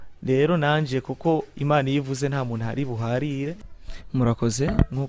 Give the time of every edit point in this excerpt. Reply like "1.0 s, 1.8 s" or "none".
3.7 s